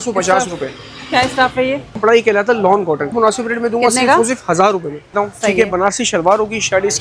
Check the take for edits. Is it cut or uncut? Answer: cut